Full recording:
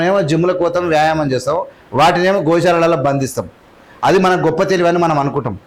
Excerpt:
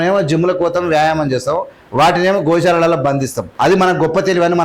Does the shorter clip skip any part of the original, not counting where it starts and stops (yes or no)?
yes